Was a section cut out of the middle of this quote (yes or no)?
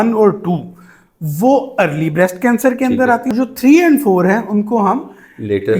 yes